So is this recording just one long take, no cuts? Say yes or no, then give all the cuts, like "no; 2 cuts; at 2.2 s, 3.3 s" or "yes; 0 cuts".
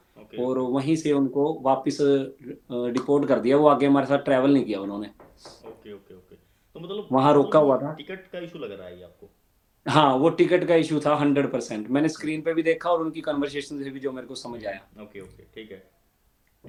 yes; 0 cuts